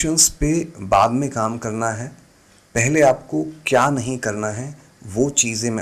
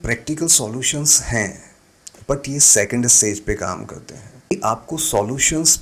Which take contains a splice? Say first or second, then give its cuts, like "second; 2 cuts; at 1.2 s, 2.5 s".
second; 1 cut; at 4.5 s